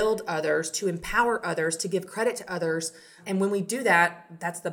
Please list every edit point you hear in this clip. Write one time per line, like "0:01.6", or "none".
0:03.2

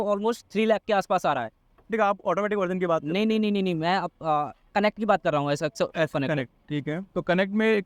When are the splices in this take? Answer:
0:01.9

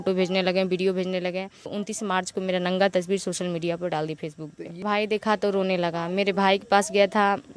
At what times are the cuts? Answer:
0:01.8
0:04.8

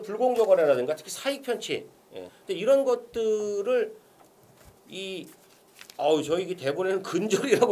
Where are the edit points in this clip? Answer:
0:02.2

